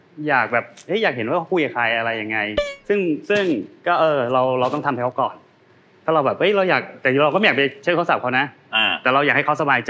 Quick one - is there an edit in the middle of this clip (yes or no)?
no